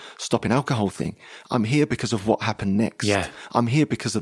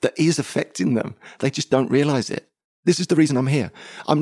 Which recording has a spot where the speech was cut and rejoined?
second; 1 cut; at 2.8 s

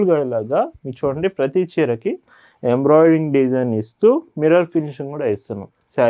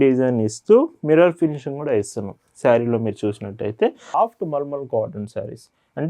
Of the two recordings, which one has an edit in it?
second; 1 cut; at 4.1 s

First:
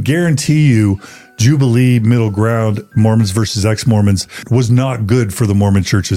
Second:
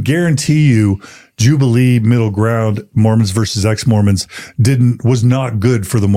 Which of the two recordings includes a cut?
first; 1 cut; at 4.4 s

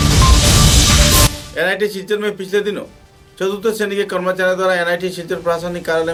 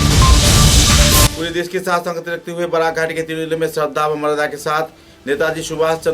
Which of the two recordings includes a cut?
second; 1 cut; at 1.3 s

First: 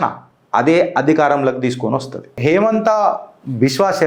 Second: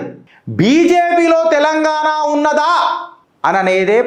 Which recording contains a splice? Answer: first; 1 cut; at 2.4 s

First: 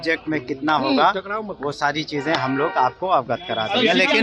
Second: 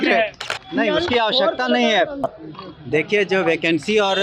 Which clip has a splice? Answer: second; 1 cut; at 2.2 s

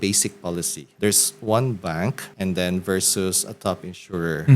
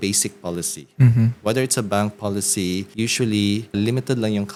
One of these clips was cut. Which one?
first; 1 cut; at 0.9 s

